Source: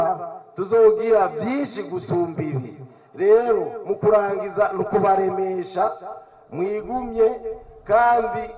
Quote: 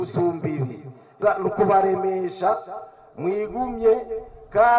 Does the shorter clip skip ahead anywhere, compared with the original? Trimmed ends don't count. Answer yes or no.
yes